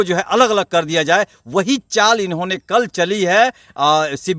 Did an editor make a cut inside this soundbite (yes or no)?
no